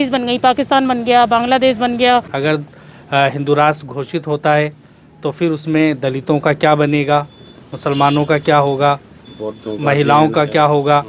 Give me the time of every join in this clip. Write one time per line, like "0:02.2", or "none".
0:02.3